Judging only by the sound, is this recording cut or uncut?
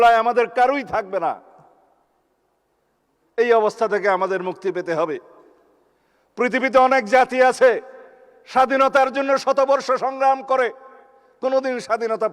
uncut